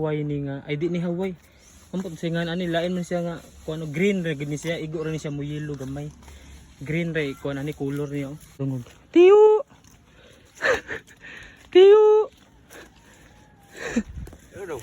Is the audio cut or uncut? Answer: cut